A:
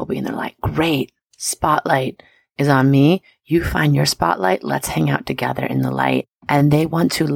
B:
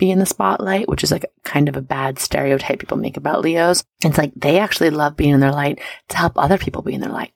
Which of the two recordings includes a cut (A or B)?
B